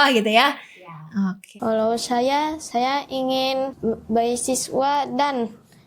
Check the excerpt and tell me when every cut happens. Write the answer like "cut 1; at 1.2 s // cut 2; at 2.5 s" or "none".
cut 1; at 1.4 s // cut 2; at 3.7 s